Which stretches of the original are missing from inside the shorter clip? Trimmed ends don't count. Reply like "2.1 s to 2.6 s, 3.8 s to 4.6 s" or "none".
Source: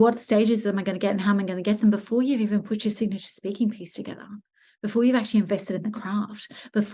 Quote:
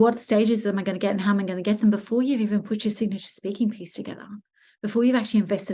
none